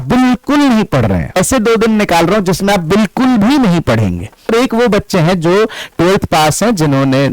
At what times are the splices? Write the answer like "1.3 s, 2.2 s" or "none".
1.4 s, 4.5 s